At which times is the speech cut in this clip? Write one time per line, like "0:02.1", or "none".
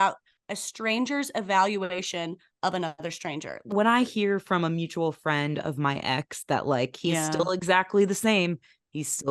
0:03.7